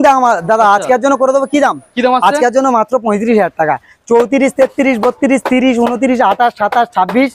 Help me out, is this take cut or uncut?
uncut